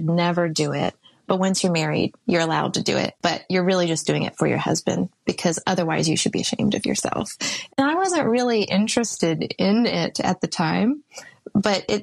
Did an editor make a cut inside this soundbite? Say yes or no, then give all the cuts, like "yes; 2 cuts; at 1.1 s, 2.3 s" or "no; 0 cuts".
no; 0 cuts